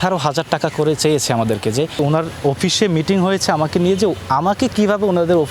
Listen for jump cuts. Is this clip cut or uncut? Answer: cut